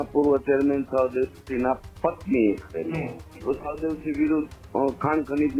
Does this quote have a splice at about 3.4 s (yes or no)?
yes